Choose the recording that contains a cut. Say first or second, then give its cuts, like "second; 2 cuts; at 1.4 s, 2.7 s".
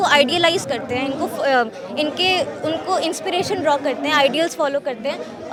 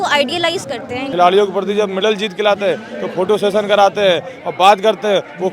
second; 1 cut; at 1.1 s